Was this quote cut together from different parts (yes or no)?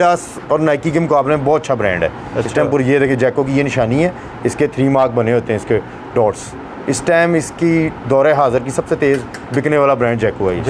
no